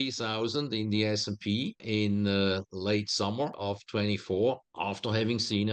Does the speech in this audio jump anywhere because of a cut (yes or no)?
yes